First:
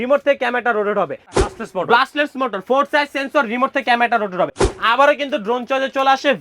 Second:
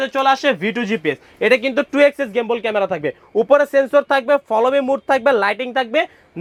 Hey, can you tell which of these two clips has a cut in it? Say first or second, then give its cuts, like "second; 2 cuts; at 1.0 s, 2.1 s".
first; 2 cuts; at 1.4 s, 4.7 s